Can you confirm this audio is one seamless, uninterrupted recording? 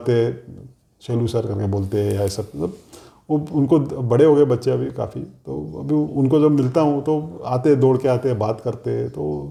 yes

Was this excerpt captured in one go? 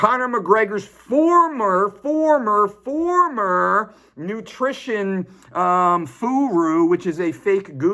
yes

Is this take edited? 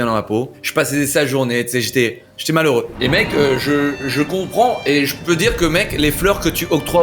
no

